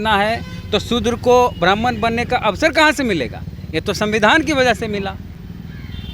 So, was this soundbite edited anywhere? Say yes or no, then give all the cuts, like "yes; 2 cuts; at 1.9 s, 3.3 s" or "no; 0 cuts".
no; 0 cuts